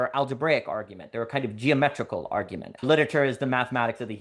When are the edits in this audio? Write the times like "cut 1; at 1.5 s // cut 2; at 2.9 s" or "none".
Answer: cut 1; at 2.8 s